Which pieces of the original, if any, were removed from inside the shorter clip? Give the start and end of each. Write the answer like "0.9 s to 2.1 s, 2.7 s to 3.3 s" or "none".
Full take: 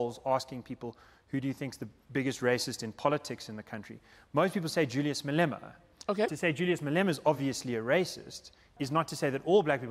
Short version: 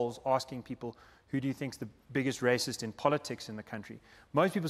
none